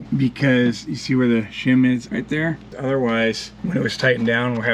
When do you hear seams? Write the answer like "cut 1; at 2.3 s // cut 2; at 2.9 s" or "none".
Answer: cut 1; at 2.7 s // cut 2; at 3.5 s